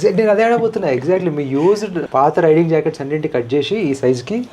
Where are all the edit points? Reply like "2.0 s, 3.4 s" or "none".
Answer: 2.0 s

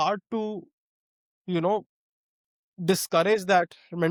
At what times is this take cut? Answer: none

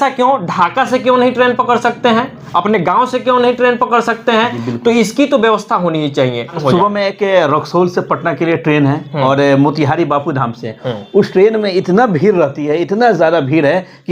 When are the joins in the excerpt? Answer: 6.6 s

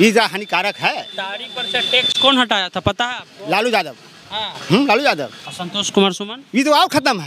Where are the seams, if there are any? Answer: 5.4 s

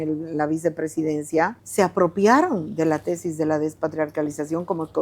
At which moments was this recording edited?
1.6 s

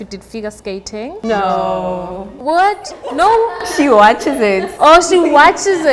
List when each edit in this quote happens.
none

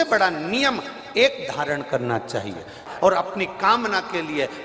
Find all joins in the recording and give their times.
2.9 s

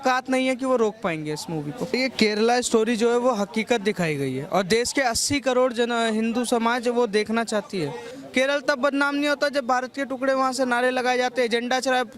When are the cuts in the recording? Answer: 1.9 s, 8.1 s

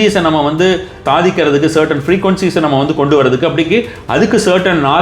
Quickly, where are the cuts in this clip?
1.0 s

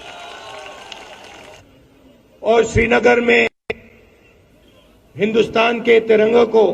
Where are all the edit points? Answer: 1.6 s

